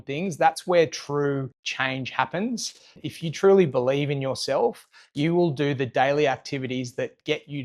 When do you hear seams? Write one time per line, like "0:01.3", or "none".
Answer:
0:01.6
0:03.0